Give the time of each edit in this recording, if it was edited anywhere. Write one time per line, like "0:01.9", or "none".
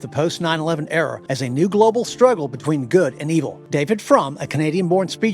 0:01.2
0:03.6